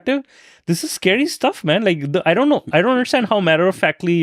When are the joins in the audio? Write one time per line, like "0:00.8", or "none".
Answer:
none